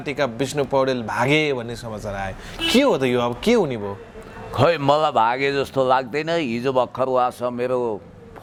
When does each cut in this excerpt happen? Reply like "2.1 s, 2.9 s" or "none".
none